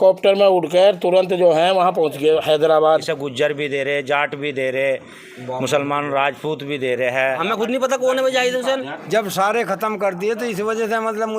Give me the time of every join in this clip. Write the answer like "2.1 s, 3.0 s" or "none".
3.1 s, 7.4 s, 9.0 s